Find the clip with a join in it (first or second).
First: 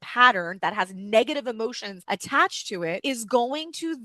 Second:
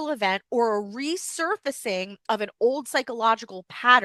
first